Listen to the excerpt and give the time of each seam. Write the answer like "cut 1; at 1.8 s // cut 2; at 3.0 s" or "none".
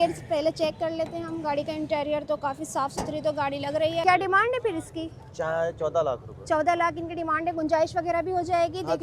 cut 1; at 4.0 s